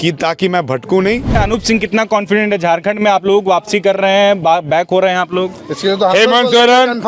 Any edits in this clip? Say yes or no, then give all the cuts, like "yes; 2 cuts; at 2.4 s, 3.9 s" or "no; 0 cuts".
yes; 1 cut; at 1.4 s